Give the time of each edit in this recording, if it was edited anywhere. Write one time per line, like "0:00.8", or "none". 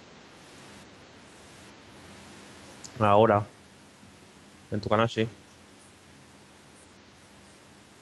0:06.8